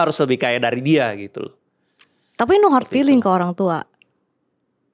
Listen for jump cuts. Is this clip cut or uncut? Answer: uncut